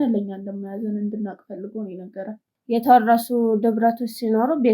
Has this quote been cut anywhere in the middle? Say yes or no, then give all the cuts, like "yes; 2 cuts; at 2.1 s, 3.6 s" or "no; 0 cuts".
yes; 1 cut; at 2.5 s